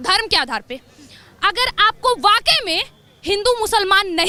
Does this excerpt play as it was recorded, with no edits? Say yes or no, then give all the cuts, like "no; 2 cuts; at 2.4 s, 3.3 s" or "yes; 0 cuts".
yes; 0 cuts